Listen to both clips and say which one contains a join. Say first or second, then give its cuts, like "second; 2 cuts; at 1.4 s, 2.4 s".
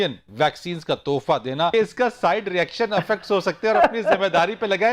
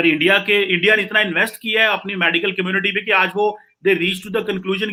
first; 1 cut; at 1.7 s